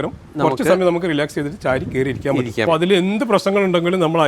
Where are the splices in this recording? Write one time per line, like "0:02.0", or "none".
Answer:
0:02.7